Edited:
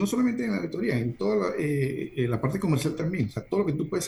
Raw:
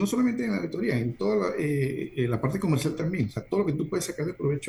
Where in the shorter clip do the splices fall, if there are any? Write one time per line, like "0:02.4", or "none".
none